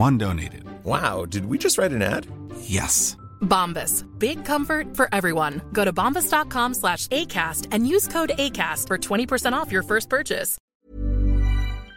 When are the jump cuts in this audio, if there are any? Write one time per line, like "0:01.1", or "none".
0:10.6

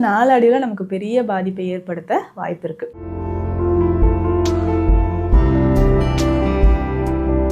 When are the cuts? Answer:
0:03.0

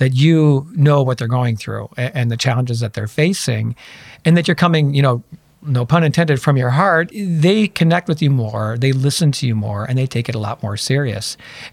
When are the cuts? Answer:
0:07.1

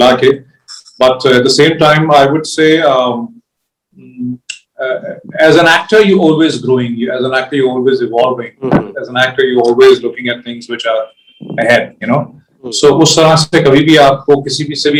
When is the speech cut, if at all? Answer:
none

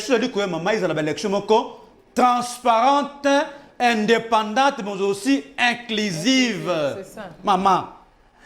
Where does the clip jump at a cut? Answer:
none

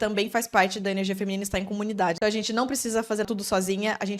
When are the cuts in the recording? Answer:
0:02.2
0:03.3

